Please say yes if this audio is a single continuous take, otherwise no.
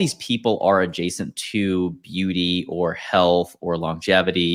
yes